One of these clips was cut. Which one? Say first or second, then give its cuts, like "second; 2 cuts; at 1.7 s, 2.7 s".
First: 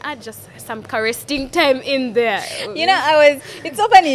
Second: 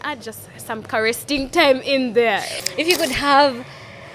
second; 1 cut; at 2.6 s